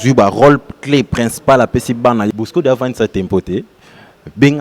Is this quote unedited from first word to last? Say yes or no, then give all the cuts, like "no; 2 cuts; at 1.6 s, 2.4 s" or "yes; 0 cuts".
no; 1 cut; at 2.3 s